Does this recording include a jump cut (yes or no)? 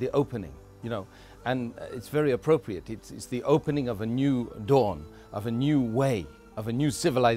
no